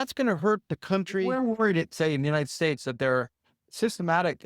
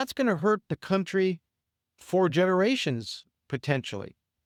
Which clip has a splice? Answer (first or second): first